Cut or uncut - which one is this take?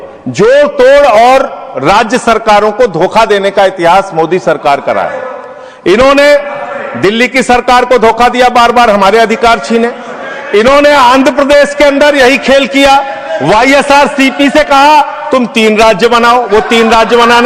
uncut